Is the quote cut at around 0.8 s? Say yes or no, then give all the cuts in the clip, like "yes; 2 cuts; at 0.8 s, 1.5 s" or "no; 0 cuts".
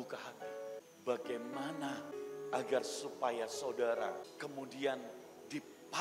yes; 3 cuts; at 0.8 s, 2.1 s, 4.3 s